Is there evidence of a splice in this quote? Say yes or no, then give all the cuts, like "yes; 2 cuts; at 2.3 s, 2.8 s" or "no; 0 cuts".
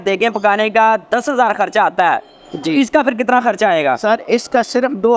no; 0 cuts